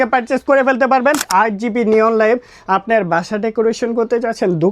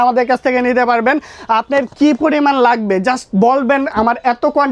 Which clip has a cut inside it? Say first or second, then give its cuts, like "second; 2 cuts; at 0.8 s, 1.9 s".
first; 1 cut; at 1.2 s